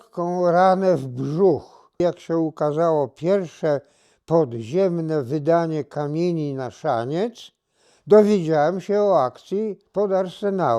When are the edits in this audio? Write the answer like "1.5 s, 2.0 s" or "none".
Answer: 2.0 s